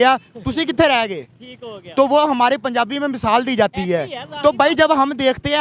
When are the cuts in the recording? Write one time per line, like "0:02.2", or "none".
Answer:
none